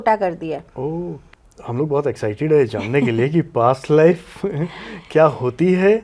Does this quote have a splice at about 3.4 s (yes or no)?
no